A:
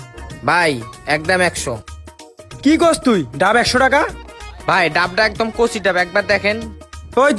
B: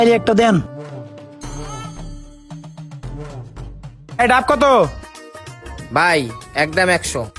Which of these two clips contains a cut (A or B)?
B